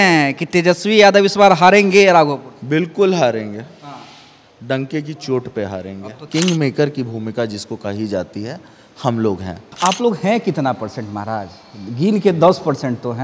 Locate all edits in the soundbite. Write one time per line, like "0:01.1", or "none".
0:06.1
0:09.6